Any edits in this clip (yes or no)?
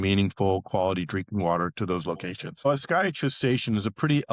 yes